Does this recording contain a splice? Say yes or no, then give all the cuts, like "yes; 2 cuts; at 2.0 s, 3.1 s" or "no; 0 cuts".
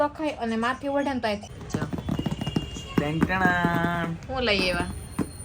yes; 1 cut; at 1.4 s